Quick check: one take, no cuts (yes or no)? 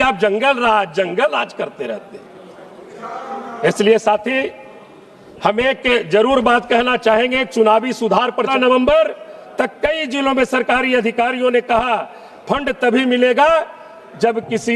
no